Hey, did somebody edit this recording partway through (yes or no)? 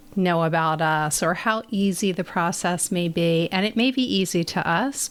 no